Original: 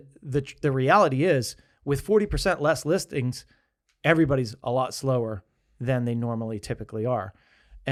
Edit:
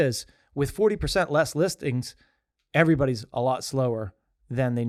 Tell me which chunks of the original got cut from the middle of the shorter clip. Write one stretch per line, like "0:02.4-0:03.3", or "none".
none